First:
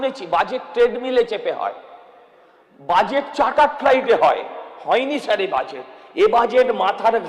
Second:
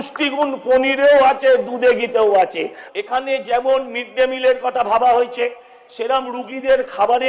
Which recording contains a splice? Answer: second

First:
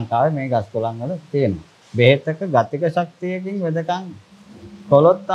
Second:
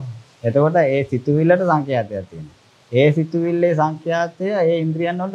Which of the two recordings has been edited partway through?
first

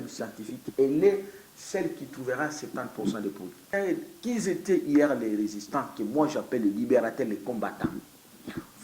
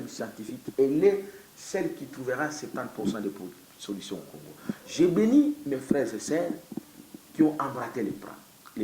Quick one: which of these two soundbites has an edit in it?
first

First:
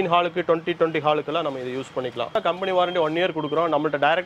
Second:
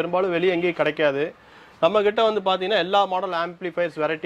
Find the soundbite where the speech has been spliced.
first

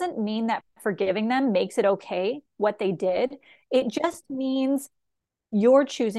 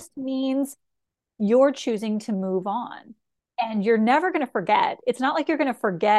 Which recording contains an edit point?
second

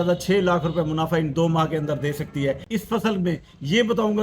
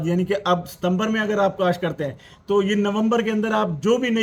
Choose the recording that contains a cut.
first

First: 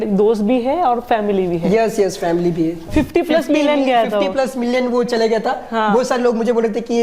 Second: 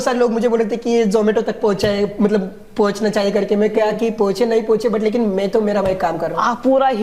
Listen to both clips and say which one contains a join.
first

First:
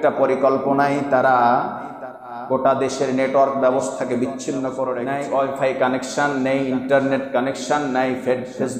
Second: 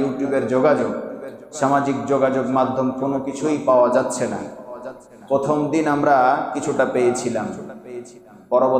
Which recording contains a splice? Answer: first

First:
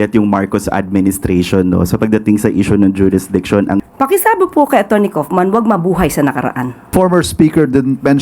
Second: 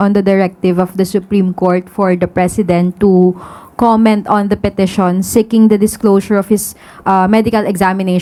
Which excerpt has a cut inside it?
first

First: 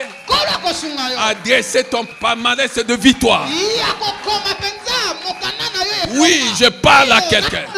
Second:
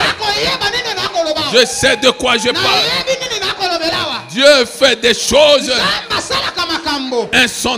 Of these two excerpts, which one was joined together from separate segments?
first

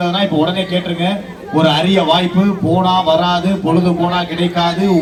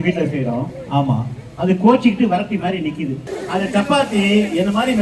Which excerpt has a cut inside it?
second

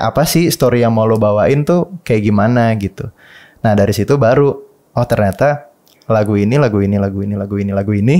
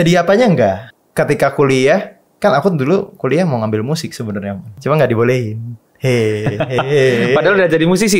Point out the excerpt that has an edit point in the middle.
second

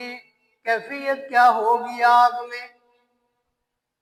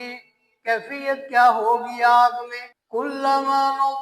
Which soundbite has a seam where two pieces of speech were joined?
second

